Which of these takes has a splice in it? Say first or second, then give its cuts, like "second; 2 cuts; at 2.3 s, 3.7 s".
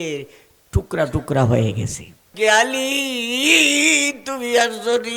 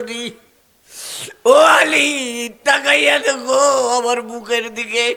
first; 1 cut; at 2.3 s